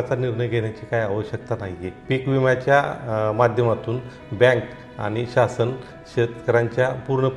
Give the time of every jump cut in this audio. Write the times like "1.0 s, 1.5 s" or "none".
2.0 s